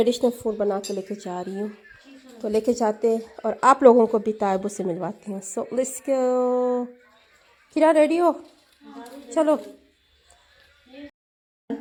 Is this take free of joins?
yes; 0 cuts

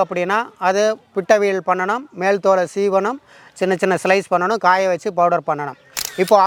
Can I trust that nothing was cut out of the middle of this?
yes; 0 cuts

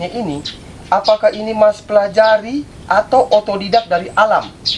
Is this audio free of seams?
yes; 0 cuts

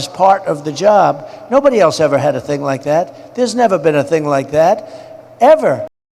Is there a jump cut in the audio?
no; 0 cuts

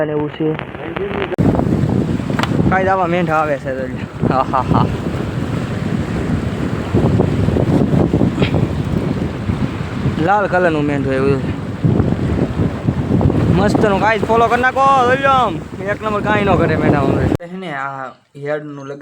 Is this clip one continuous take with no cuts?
no; 2 cuts; at 1.4 s, 17.4 s

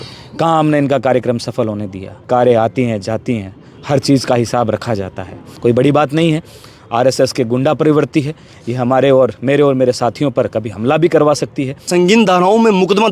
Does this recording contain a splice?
yes; 3 cuts; at 2.2 s, 5.4 s, 11.8 s

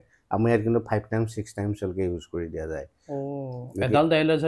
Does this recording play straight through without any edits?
yes; 0 cuts

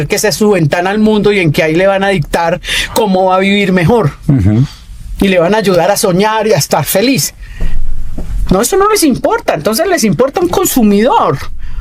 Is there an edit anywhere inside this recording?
no; 0 cuts

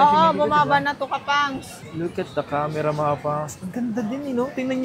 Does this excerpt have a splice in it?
yes; 1 cut; at 1.8 s

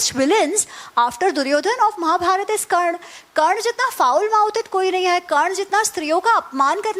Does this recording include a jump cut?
no; 0 cuts

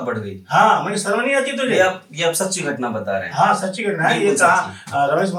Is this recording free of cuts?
yes; 0 cuts

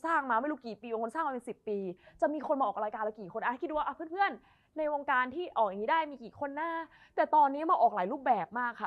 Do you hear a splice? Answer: no; 0 cuts

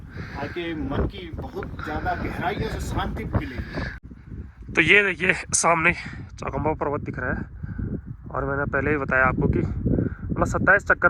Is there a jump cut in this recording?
yes; 1 cut; at 4.0 s

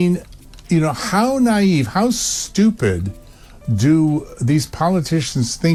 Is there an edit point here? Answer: no; 0 cuts

